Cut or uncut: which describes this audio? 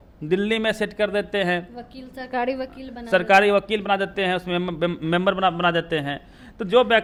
uncut